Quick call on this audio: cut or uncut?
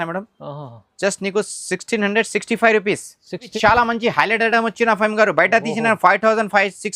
cut